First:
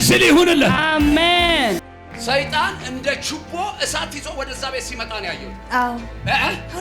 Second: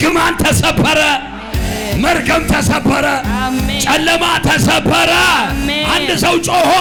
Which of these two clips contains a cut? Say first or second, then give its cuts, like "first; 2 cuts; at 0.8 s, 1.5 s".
first; 1 cut; at 1.9 s